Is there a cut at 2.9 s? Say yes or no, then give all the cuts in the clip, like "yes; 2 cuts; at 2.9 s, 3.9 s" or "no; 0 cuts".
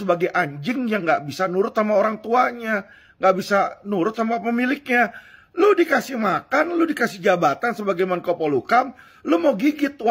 no; 0 cuts